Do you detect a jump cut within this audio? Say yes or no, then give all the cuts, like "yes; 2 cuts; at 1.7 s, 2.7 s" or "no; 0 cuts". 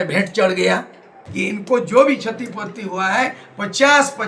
yes; 1 cut; at 1.2 s